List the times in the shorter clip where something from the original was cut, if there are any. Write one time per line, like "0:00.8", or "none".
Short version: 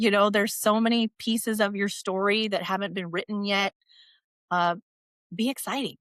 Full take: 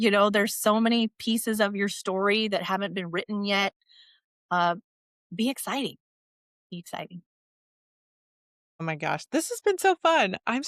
none